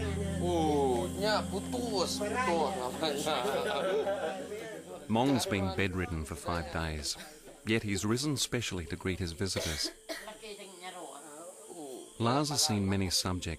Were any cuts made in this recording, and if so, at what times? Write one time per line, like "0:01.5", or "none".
0:09.3